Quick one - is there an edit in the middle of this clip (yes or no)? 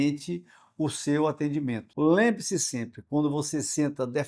yes